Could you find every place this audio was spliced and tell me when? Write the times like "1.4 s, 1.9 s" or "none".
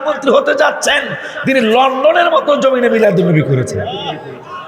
none